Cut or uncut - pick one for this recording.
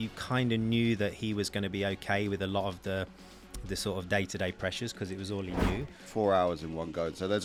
cut